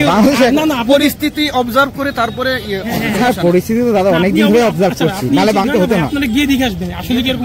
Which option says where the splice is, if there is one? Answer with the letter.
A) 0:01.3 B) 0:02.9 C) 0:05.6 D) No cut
C